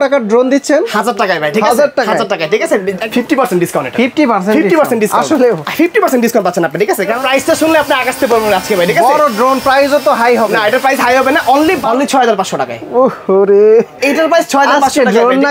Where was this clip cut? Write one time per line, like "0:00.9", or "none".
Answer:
0:03.1
0:07.2
0:11.8